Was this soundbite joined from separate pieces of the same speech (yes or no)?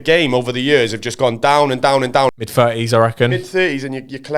yes